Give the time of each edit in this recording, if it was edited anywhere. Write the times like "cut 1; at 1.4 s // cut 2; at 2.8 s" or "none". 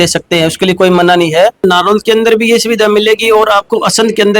cut 1; at 1.6 s